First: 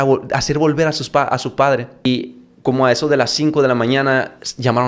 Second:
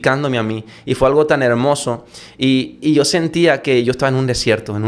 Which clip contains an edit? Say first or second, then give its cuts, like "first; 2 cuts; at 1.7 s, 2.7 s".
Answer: first; 1 cut; at 2.1 s